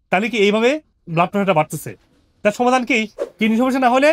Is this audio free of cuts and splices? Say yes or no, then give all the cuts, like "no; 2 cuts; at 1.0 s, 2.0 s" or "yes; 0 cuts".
no; 1 cut; at 3.2 s